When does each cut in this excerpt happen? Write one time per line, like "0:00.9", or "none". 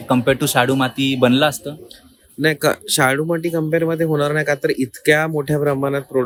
none